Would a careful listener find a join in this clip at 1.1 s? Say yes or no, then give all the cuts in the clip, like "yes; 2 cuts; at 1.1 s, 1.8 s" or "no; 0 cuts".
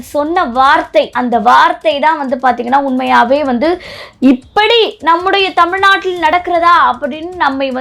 yes; 1 cut; at 1.1 s